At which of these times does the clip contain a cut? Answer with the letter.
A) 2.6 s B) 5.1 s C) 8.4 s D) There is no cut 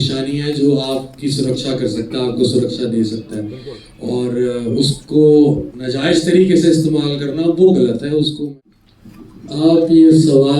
C